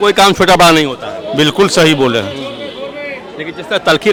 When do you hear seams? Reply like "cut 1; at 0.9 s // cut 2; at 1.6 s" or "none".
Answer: none